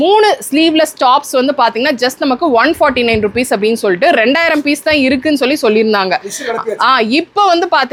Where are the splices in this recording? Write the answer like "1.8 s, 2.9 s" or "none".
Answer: none